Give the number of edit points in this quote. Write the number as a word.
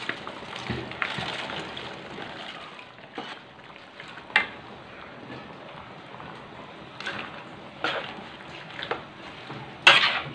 one